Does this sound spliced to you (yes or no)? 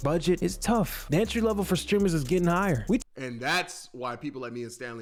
no